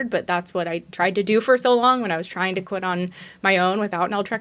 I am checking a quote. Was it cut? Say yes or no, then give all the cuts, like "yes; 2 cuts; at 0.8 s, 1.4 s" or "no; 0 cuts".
no; 0 cuts